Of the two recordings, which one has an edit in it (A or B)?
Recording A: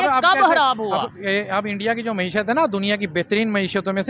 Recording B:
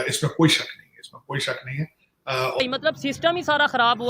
B